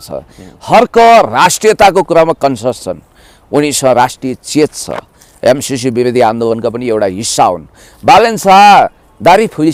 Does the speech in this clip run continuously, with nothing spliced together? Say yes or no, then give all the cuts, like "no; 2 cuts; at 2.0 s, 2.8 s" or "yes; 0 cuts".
yes; 0 cuts